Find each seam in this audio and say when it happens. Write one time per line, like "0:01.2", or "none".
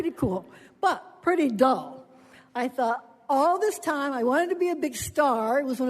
0:03.2